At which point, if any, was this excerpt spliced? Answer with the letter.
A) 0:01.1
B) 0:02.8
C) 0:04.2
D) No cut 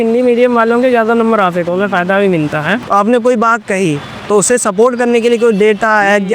B